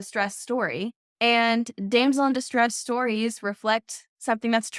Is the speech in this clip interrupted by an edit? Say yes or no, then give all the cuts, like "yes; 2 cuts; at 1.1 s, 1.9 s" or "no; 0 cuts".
yes; 1 cut; at 1.0 s